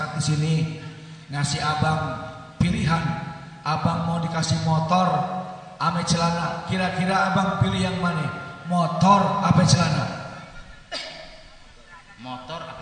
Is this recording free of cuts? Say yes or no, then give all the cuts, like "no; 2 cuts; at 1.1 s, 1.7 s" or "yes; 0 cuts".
yes; 0 cuts